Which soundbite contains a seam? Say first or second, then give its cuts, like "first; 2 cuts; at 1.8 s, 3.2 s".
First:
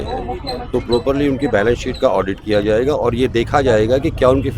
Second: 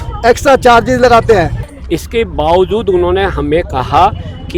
second; 1 cut; at 1.6 s